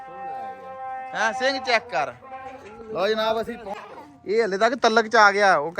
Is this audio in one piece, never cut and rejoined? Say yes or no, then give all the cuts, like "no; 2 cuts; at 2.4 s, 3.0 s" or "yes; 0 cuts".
no; 1 cut; at 3.7 s